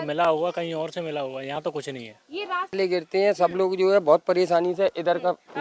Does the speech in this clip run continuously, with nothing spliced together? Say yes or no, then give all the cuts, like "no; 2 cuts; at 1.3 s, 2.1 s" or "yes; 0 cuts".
no; 1 cut; at 2.8 s